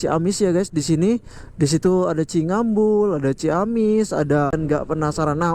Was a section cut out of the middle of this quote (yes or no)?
yes